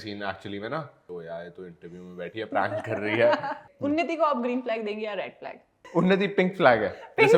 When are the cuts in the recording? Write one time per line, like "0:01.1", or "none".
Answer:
0:01.0
0:03.7
0:05.9